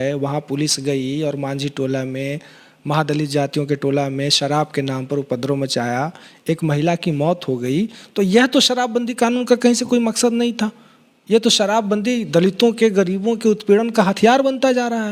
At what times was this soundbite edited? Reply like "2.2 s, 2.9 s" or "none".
none